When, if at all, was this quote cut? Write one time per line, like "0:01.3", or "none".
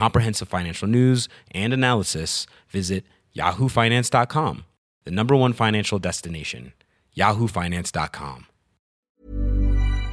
0:09.0

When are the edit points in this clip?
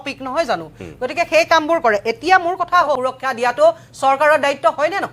0:03.0

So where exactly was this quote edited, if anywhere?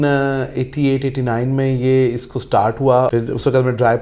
0:03.1

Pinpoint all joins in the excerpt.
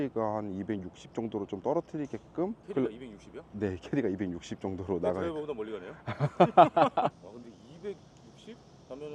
0:02.6
0:07.2

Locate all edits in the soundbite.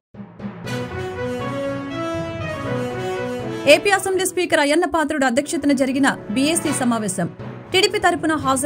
0:03.6

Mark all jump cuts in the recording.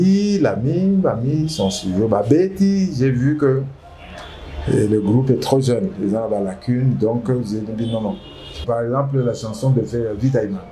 0:08.6

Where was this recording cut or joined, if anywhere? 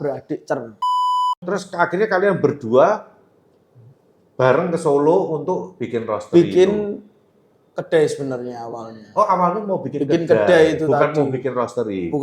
0:01.2

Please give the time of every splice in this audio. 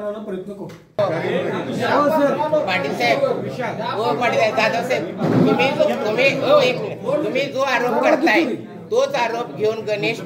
0:01.0

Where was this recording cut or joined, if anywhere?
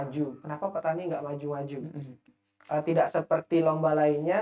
0:02.2

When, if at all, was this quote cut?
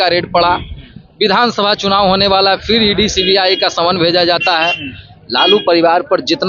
none

